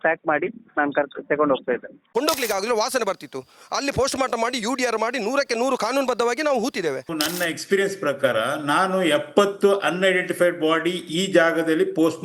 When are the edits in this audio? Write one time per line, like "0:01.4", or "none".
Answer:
0:02.0
0:07.0